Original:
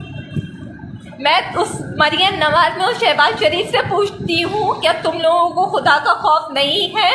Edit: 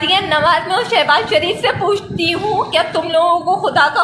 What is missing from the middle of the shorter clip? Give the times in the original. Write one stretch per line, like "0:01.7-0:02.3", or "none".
none